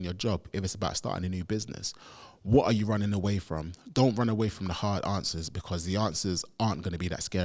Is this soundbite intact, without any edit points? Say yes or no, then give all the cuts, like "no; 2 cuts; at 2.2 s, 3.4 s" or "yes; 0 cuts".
yes; 0 cuts